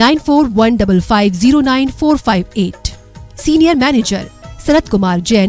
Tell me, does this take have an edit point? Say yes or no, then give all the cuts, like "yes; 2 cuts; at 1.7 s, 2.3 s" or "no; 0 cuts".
no; 0 cuts